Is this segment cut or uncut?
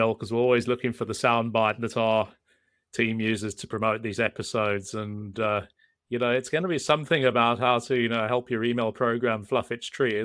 uncut